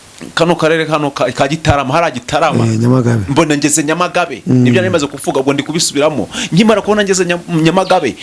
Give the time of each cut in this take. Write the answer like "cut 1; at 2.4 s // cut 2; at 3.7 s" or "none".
none